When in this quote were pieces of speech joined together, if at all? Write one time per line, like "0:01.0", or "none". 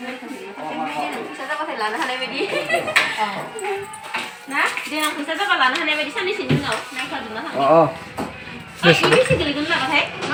none